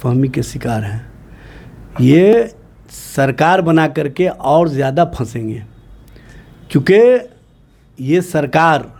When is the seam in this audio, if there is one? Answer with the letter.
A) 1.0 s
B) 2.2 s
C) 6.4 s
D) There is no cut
D